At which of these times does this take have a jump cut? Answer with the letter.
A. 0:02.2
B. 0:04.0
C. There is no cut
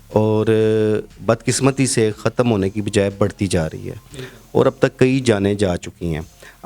C